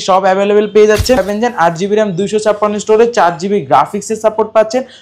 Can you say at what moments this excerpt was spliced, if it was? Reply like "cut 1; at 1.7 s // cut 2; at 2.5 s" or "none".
cut 1; at 1.2 s